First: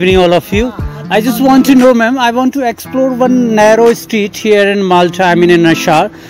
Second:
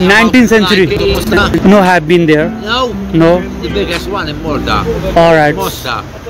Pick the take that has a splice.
second; 1 cut; at 1.4 s

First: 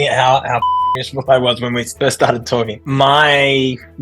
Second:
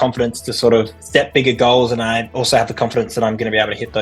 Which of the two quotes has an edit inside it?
first; 1 cut; at 2.8 s

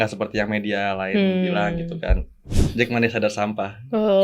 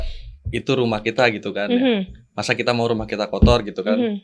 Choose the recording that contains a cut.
first; 1 cut; at 2.6 s

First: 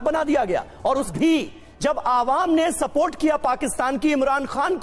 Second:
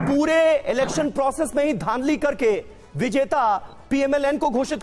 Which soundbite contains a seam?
first; 1 cut; at 1.1 s

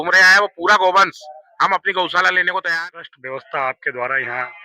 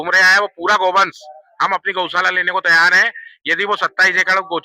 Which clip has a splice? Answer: first; 1 cut; at 2.7 s

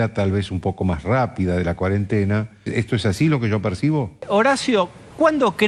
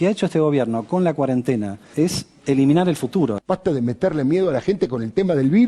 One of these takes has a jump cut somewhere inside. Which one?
second; 1 cut; at 3.4 s

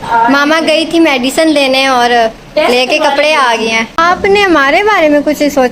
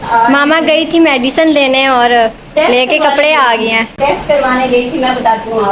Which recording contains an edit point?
first; 1 cut; at 4.0 s

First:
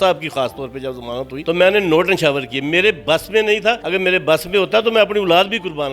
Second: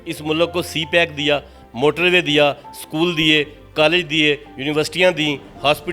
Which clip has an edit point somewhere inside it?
first; 2 cuts; at 1.3 s, 3.8 s

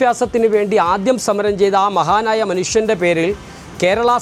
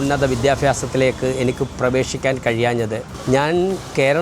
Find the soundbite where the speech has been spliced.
second; 1 cut; at 3.1 s

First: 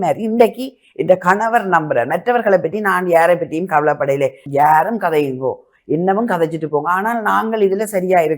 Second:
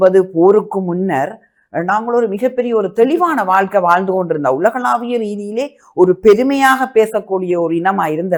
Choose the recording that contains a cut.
first; 1 cut; at 4.4 s

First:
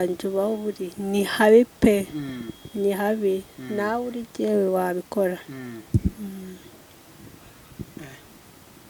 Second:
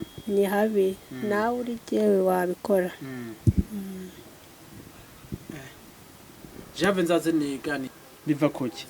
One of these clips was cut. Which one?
second; 1 cut; at 7.9 s

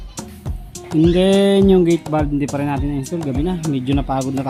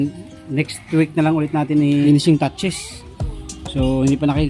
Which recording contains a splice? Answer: second; 1 cut; at 2.0 s

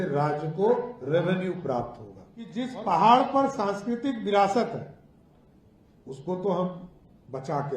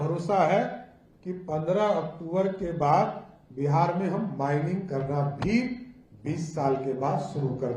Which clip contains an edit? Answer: first; 1 cut; at 2.6 s

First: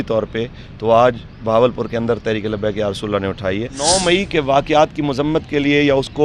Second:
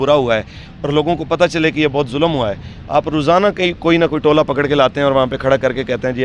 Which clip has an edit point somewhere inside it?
first; 1 cut; at 3.8 s

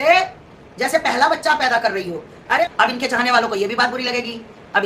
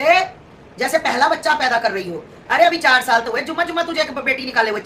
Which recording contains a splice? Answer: first; 1 cut; at 2.6 s

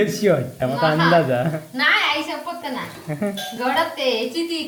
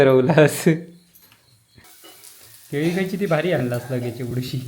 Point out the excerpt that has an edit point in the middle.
second; 1 cut; at 1.8 s

